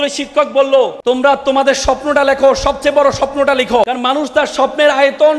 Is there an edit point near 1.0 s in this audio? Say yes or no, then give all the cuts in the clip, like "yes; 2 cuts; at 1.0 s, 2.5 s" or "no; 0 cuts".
yes; 2 cuts; at 1.0 s, 3.9 s